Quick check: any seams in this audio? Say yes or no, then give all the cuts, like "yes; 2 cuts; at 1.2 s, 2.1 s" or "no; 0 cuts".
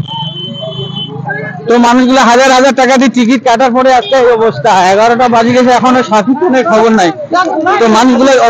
no; 0 cuts